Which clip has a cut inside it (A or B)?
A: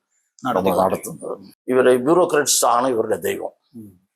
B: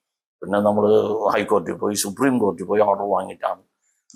A